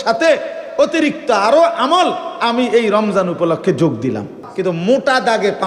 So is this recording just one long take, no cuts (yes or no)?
no